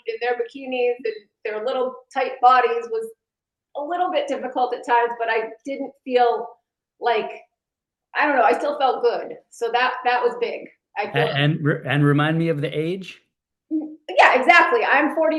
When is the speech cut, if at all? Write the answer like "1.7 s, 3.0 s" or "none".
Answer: none